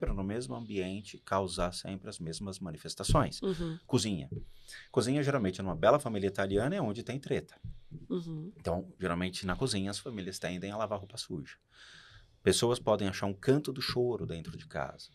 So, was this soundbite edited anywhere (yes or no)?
no